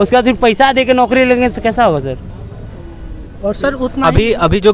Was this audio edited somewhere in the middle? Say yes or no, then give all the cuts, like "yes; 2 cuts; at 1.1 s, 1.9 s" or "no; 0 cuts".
no; 0 cuts